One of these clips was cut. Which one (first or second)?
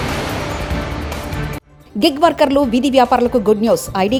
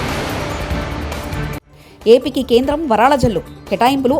second